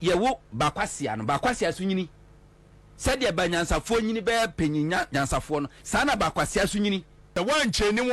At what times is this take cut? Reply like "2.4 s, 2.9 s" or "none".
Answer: 7.2 s